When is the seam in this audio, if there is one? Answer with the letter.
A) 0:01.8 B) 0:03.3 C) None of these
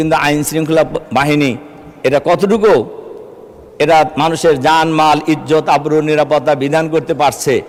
C